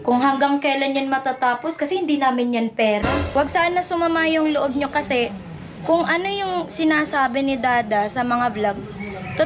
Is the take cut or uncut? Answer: cut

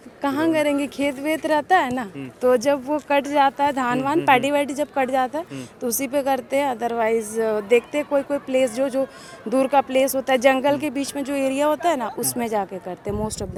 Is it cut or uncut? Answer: uncut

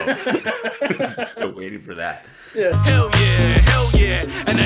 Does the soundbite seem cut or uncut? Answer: cut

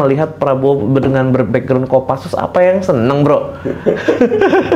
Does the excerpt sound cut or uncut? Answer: uncut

